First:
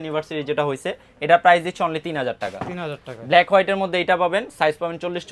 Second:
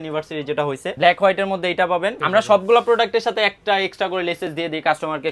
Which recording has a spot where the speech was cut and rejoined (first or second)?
second